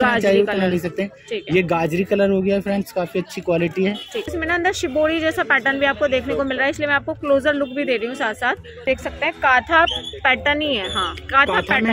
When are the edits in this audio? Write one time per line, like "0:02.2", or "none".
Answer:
0:04.3
0:08.9